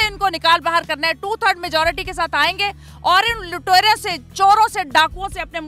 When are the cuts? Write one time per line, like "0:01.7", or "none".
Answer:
none